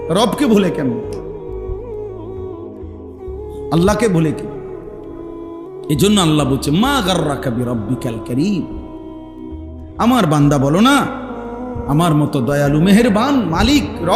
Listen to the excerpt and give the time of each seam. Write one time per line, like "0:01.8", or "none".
0:04.3
0:05.9